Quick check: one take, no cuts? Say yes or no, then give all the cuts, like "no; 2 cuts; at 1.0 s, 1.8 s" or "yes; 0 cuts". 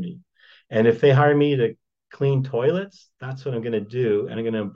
yes; 0 cuts